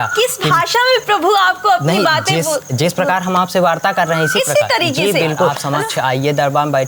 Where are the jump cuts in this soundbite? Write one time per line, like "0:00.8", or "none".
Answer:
0:05.6